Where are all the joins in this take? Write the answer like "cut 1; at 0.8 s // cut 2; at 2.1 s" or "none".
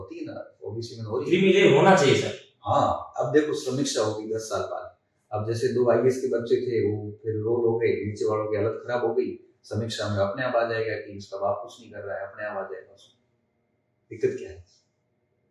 none